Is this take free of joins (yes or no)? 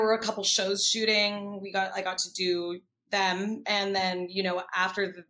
yes